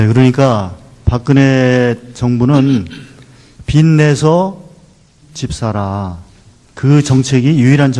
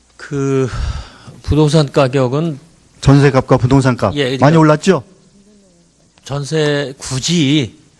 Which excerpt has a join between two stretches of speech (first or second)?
first